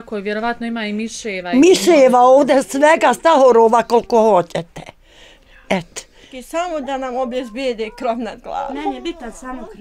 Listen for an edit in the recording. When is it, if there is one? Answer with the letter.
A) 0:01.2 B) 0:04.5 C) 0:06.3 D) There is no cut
C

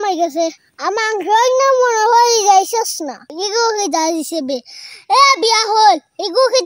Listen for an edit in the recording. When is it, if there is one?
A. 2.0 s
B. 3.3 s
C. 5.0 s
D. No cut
B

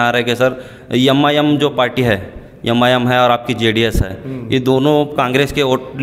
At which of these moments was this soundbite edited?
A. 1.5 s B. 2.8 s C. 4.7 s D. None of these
D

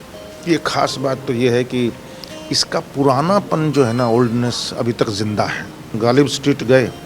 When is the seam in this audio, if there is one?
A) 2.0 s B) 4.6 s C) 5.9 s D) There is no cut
C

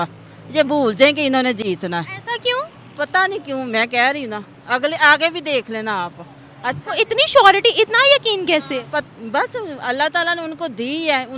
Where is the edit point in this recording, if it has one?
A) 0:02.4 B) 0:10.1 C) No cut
A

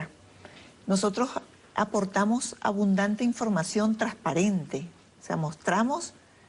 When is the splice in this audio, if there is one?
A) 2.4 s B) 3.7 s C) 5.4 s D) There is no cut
B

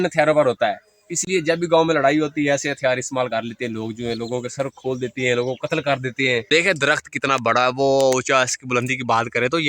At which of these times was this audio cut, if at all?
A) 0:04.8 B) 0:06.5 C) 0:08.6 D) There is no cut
B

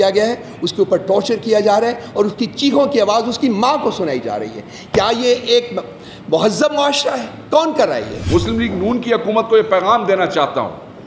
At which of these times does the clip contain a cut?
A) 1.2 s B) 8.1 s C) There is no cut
B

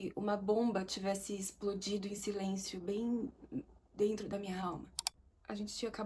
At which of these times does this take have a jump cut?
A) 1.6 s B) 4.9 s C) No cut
B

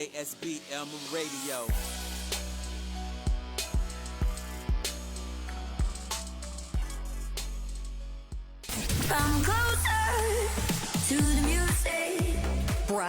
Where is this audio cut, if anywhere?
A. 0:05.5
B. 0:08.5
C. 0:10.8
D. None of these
B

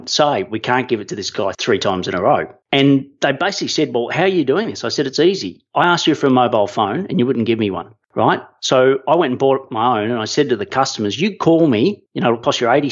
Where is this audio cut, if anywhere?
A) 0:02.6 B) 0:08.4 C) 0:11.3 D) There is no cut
A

